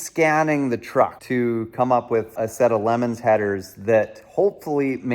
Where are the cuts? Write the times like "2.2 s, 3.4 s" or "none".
1.2 s, 2.3 s